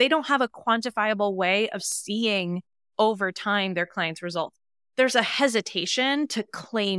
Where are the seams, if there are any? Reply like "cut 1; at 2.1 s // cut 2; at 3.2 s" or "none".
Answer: cut 1; at 4.8 s